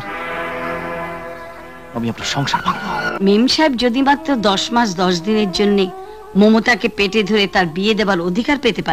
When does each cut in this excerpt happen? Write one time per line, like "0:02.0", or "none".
0:03.1

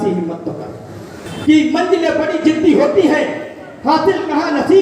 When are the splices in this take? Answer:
0:01.2

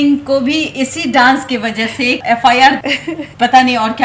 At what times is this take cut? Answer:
0:02.8

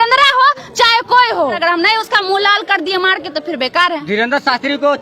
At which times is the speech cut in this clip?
0:01.6

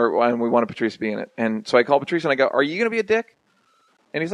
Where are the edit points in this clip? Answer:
0:01.7

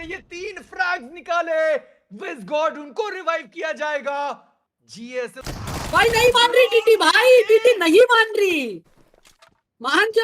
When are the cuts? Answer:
0:05.4

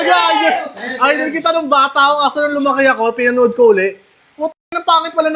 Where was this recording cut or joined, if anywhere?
none

